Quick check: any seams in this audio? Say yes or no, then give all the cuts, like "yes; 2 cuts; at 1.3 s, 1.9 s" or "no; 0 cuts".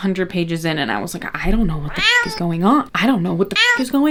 no; 0 cuts